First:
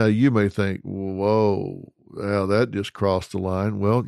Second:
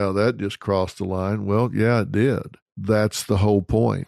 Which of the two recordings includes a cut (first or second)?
second